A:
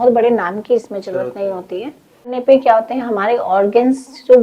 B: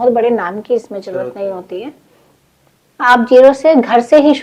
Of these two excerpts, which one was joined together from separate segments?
A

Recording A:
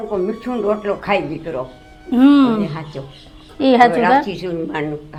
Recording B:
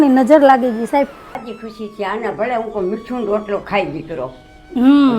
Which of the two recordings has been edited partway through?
B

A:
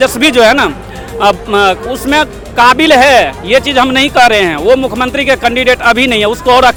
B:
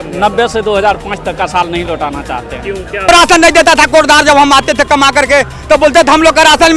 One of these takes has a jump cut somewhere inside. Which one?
B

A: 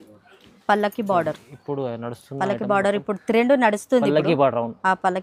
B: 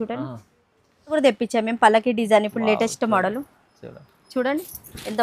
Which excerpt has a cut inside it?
B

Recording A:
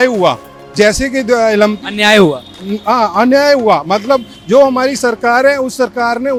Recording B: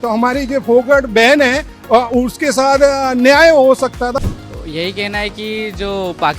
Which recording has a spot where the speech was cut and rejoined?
B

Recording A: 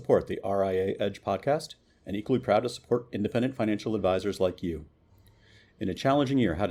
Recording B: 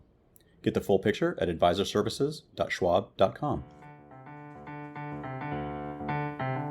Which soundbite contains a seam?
B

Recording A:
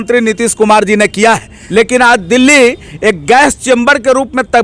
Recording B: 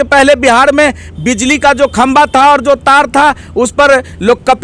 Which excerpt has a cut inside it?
A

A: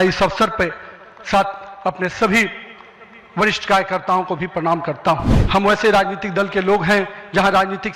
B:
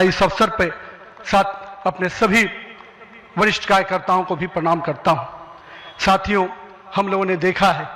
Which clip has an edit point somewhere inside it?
A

